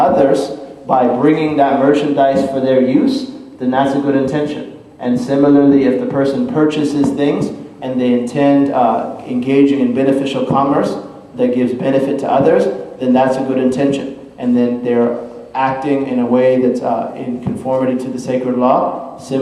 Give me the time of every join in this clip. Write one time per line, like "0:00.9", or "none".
0:09.2